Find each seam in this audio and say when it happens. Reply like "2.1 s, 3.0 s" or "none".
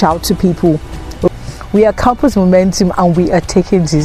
1.3 s